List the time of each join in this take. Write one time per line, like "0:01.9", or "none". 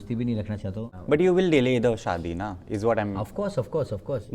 0:01.0